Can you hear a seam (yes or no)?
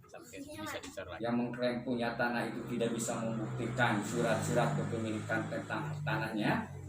yes